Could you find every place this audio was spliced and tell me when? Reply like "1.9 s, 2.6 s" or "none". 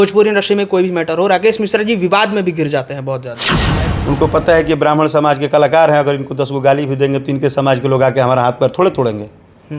3.6 s